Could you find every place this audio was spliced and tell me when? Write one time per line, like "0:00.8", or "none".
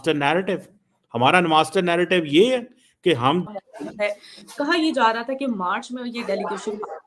0:03.5